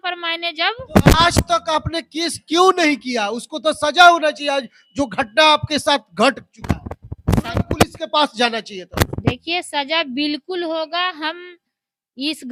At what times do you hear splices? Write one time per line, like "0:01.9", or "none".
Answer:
none

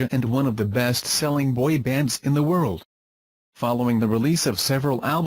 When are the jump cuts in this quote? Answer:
0:02.9

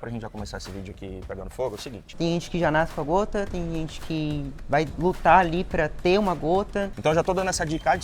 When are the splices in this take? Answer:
0:02.0
0:06.9

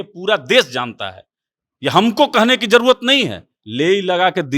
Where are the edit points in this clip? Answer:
0:03.6

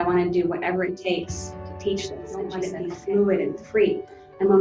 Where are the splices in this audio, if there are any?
0:02.7

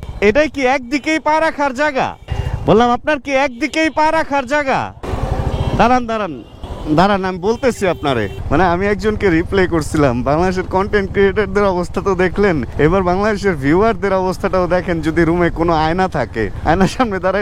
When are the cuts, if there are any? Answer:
0:05.1
0:08.4

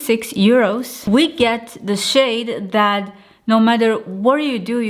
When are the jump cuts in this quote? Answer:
0:00.9

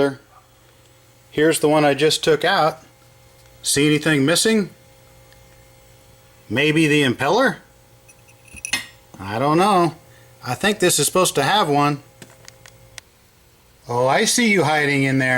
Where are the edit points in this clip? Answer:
0:13.0

